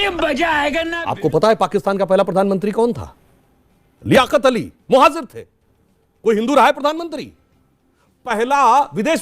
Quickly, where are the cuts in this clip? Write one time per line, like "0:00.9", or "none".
0:01.0

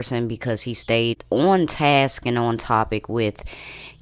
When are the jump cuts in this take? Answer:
0:01.2

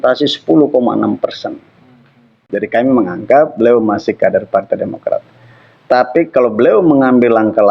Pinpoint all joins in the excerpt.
0:02.4

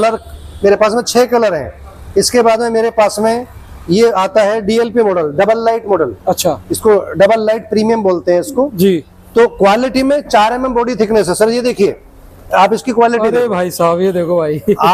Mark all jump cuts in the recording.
none

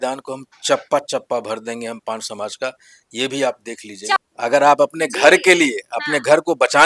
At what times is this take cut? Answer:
0:04.2

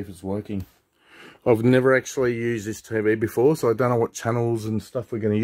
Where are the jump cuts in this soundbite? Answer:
none

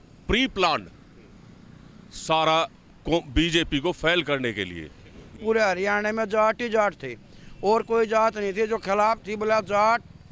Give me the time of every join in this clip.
0:05.4

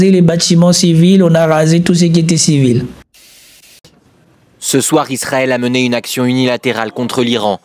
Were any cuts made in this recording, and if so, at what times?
0:03.6

